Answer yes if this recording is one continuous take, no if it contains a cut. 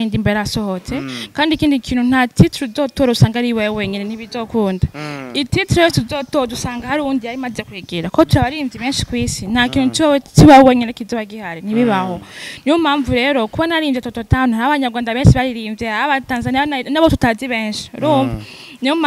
yes